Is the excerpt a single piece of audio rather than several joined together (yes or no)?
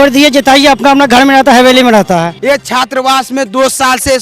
no